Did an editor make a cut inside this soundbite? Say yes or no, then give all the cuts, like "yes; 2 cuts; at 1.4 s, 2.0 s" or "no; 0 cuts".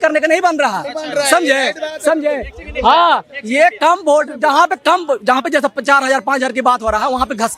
no; 0 cuts